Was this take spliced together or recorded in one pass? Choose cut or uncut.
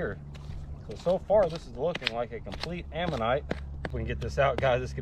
cut